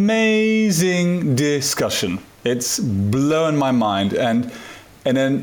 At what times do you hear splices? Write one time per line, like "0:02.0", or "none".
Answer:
none